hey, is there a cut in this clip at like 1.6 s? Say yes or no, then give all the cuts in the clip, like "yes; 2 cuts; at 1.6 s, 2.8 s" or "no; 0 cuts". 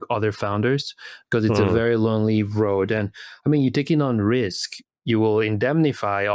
no; 1 cut; at 4.9 s